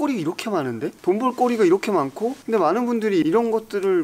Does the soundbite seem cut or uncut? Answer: cut